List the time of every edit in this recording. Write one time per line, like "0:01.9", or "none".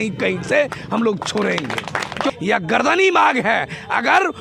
0:02.3

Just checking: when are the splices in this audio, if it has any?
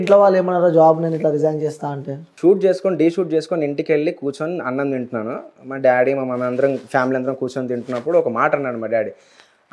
0:02.3

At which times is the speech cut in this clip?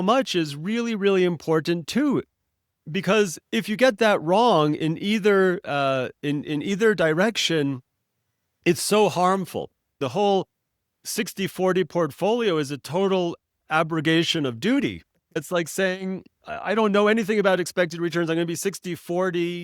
0:10.0
0:15.4

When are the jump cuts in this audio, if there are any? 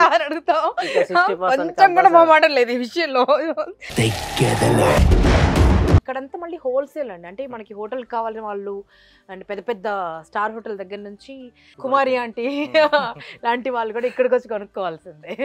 0:06.1
0:11.6

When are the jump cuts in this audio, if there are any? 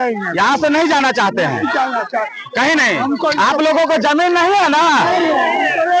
none

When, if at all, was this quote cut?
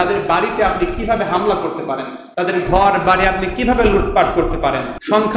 none

